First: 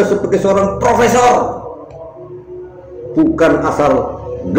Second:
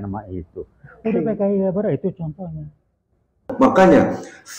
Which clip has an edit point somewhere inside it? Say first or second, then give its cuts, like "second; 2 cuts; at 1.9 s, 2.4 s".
second; 1 cut; at 3.5 s